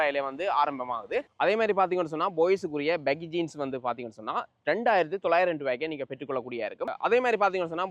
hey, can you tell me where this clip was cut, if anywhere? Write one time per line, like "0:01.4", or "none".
none